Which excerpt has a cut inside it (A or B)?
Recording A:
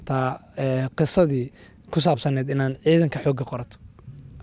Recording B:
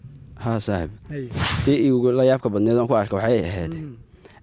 B